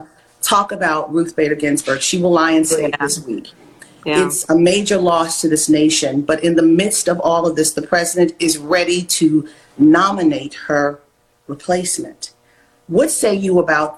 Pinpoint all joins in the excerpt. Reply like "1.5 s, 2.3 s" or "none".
none